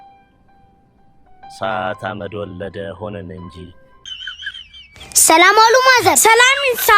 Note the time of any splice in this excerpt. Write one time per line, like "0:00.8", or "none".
0:04.1